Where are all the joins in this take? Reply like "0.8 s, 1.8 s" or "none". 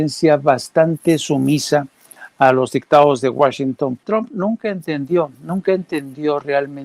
4.0 s